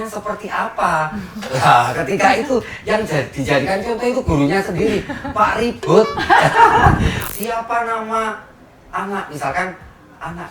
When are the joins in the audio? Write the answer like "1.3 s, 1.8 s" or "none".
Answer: 7.2 s